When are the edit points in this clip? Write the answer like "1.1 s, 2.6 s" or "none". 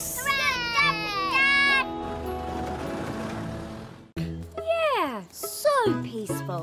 4.1 s